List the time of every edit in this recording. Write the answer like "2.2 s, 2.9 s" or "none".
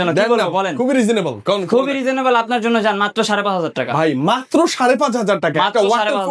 none